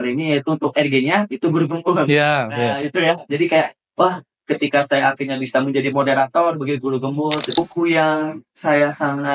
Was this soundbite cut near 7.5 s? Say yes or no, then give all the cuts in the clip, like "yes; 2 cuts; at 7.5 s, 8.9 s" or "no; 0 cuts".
yes; 1 cut; at 7.5 s